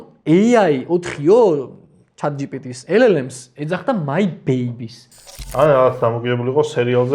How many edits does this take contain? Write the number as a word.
one